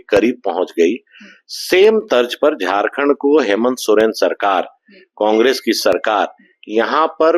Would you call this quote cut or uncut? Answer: uncut